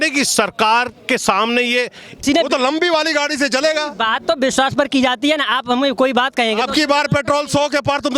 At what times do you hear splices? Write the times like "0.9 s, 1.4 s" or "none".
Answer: 2.2 s